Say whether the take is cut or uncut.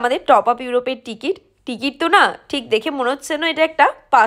uncut